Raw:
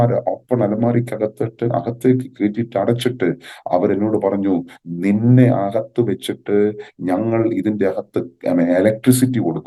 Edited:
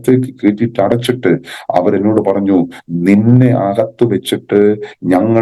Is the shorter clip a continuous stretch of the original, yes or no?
yes